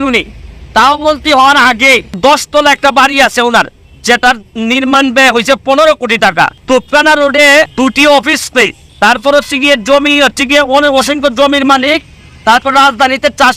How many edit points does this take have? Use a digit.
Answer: 4